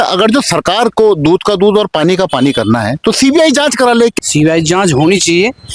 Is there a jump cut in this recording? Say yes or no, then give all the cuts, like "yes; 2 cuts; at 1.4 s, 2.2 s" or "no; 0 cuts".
yes; 1 cut; at 4.1 s